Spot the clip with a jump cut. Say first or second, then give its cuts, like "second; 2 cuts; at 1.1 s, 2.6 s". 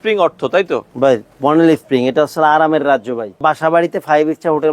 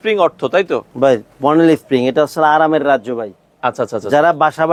first; 1 cut; at 3.4 s